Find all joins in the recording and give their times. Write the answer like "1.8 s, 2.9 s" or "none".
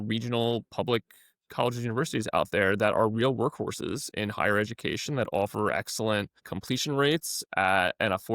6.5 s